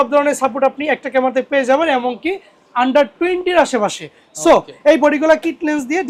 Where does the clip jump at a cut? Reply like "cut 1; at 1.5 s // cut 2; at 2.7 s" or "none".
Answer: none

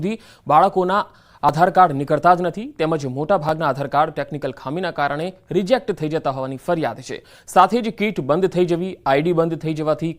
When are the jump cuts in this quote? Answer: none

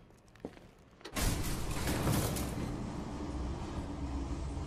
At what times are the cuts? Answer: cut 1; at 3.7 s

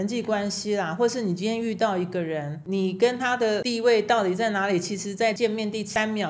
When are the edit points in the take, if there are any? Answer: cut 1; at 2.6 s // cut 2; at 3.7 s // cut 3; at 5.5 s

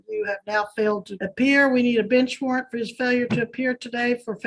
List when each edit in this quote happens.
cut 1; at 1.1 s

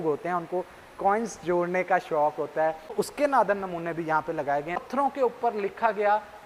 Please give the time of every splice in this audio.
cut 1; at 2.9 s // cut 2; at 4.8 s

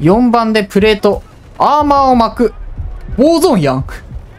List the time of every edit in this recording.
none

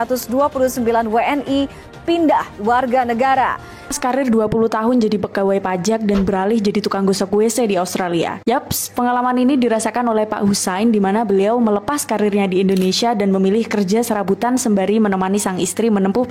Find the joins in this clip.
cut 1; at 3.9 s

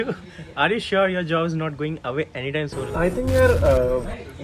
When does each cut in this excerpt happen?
none

